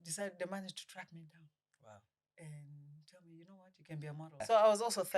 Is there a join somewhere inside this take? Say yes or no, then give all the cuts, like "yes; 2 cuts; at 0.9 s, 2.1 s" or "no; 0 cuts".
yes; 1 cut; at 4.3 s